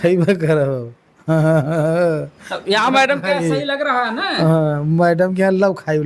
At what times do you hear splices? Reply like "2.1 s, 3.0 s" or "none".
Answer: none